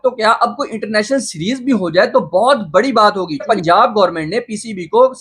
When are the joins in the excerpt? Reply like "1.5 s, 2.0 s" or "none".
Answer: 3.4 s